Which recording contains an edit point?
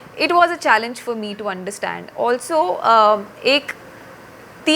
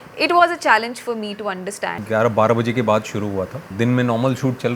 second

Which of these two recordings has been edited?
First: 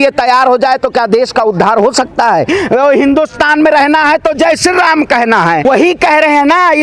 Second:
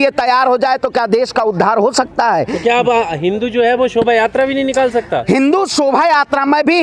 first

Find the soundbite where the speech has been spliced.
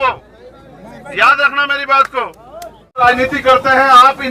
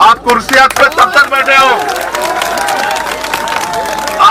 first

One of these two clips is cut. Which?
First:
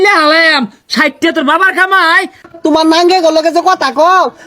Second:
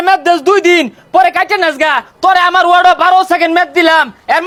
first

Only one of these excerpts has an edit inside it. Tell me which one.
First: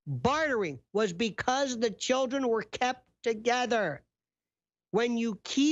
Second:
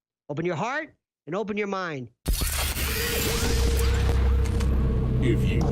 second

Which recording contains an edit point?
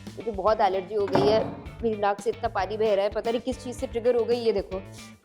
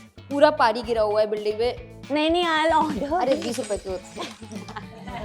second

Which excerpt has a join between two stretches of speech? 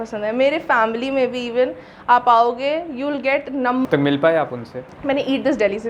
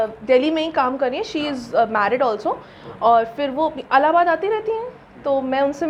first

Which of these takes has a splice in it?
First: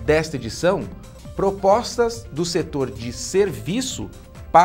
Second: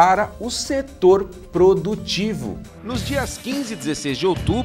second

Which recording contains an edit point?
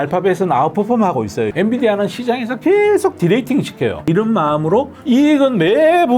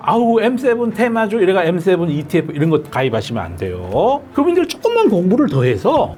first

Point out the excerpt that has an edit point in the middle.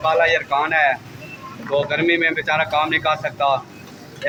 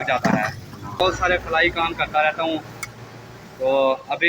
second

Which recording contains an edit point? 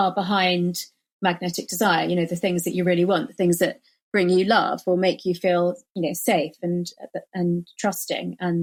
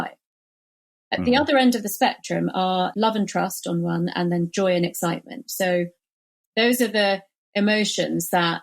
second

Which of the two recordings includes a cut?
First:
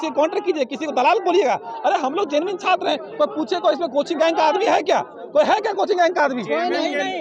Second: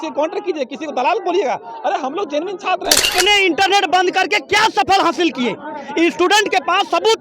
second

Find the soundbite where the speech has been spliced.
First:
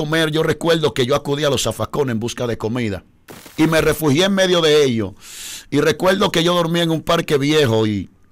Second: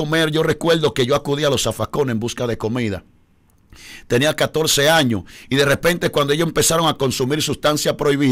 first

